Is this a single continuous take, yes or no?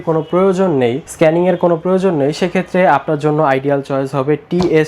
no